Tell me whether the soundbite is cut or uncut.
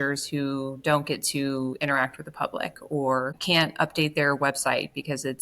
cut